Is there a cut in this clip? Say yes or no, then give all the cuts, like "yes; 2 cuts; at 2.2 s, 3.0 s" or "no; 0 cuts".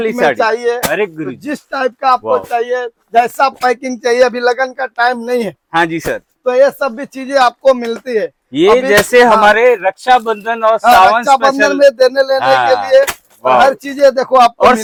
no; 0 cuts